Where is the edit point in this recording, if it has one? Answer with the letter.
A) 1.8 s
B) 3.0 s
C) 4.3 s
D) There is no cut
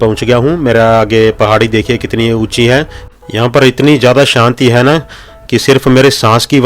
B